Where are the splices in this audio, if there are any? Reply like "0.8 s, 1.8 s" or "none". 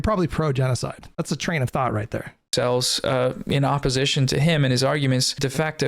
1.0 s, 2.3 s